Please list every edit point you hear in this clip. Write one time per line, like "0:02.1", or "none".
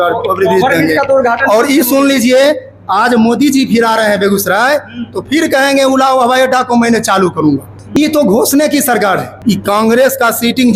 0:07.8
0:09.3

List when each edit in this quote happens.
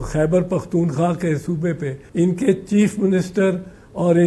0:02.0

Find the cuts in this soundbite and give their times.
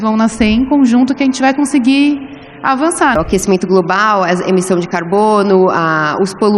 0:03.1

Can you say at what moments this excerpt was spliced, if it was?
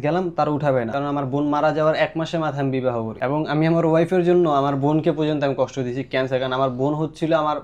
0:00.9
0:03.1

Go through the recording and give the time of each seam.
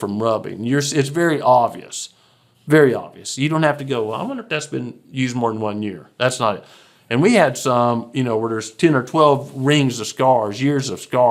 none

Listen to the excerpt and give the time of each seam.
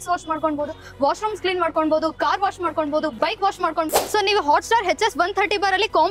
0:03.9

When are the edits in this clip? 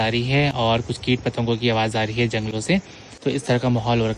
none

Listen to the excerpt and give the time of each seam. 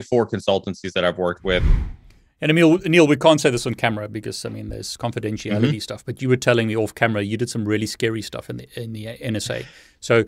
0:01.7

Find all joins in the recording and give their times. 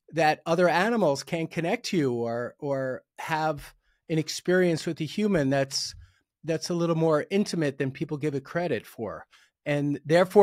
none

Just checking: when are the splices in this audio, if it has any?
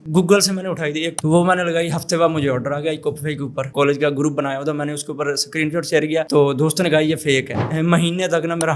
0:01.1
0:03.7
0:07.6

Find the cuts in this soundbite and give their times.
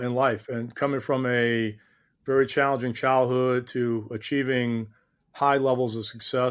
none

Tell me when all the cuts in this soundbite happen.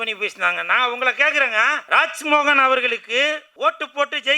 0:01.8
0:03.5

